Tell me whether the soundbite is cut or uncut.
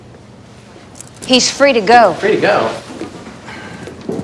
cut